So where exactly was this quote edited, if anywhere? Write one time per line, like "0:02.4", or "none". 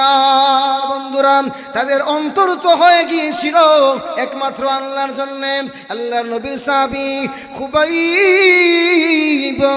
0:01.0